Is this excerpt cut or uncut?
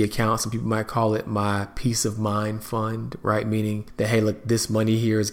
cut